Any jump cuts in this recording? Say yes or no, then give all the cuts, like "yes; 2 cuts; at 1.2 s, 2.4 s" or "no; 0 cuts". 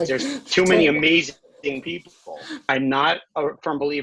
yes; 1 cut; at 2.5 s